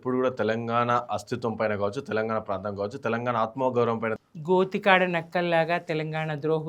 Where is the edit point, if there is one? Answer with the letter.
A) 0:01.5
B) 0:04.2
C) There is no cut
B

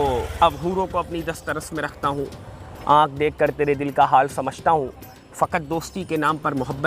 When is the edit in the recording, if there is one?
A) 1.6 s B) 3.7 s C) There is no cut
C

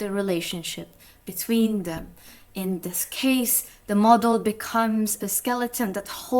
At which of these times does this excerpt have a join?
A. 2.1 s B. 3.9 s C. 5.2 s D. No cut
C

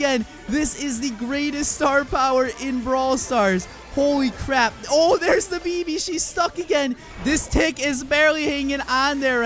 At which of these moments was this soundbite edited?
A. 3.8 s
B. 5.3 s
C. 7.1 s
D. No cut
C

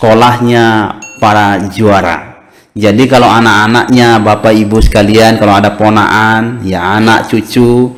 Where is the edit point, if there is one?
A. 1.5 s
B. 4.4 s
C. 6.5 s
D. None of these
D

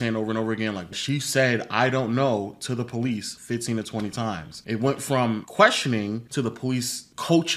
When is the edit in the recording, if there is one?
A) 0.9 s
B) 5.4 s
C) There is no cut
A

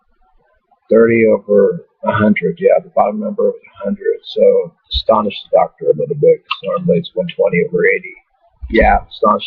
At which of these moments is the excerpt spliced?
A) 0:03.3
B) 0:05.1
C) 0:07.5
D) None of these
C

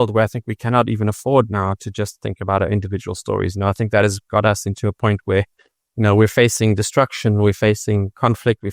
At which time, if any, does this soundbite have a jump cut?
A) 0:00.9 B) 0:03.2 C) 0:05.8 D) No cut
D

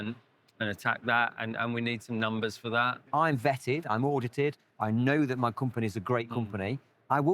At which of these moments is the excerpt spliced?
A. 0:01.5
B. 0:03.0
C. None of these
B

